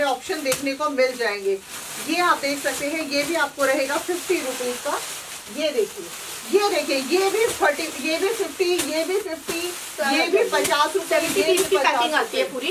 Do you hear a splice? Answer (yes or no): no